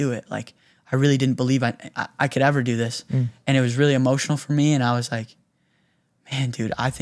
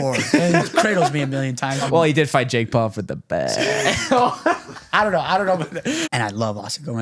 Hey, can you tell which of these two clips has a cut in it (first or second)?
second